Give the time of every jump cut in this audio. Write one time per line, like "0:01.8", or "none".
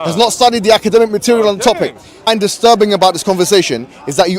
0:02.3